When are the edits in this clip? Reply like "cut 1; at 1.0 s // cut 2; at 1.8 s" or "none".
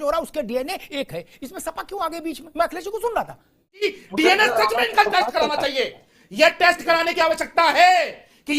cut 1; at 3.8 s